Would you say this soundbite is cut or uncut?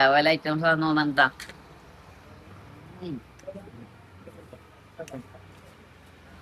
uncut